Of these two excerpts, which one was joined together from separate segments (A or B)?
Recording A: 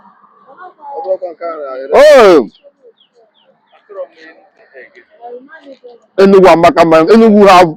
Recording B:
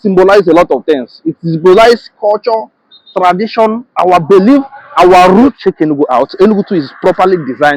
B